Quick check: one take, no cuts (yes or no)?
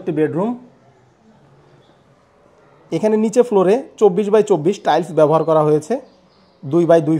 no